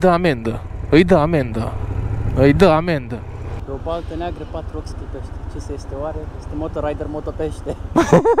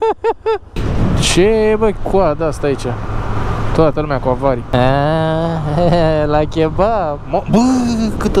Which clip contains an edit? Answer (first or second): first